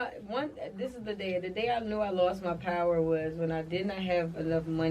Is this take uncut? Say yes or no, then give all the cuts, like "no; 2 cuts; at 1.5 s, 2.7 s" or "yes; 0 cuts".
yes; 0 cuts